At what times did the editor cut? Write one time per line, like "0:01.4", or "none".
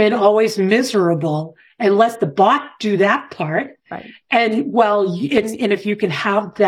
none